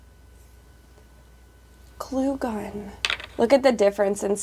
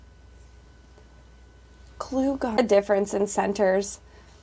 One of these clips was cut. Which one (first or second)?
second